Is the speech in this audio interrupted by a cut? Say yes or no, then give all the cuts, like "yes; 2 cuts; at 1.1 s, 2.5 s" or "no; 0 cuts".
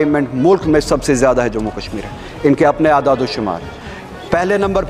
no; 0 cuts